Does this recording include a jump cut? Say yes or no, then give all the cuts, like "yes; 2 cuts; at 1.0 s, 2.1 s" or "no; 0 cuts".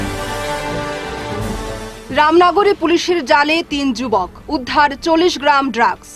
yes; 1 cut; at 1.5 s